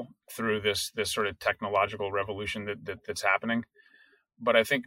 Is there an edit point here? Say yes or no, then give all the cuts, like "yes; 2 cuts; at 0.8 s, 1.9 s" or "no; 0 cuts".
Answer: no; 0 cuts